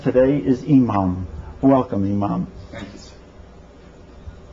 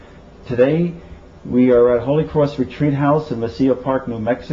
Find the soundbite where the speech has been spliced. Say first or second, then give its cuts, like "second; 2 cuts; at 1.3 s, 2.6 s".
first; 1 cut; at 2.8 s